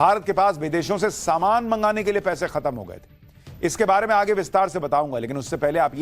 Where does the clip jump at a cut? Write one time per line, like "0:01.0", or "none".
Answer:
0:01.0